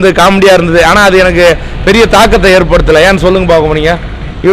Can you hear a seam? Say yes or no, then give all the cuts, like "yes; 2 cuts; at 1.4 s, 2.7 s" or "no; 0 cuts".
no; 0 cuts